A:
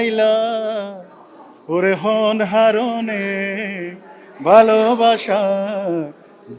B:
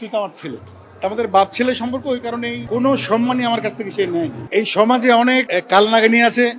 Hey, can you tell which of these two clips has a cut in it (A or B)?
B